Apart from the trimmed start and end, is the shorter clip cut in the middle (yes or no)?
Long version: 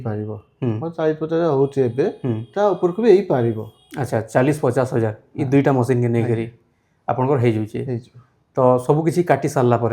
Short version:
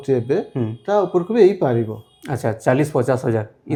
no